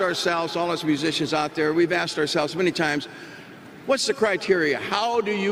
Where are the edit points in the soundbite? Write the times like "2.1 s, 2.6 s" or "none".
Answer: none

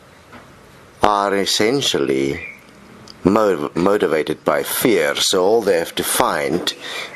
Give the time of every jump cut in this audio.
3.5 s

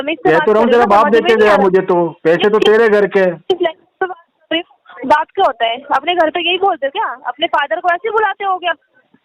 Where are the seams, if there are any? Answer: none

